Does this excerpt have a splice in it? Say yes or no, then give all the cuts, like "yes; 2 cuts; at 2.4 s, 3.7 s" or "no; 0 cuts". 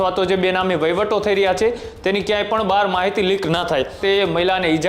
yes; 1 cut; at 3.9 s